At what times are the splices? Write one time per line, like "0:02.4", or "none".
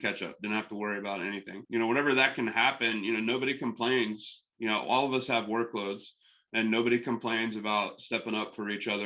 none